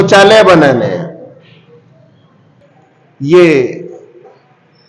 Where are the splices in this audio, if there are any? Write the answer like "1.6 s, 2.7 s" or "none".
2.6 s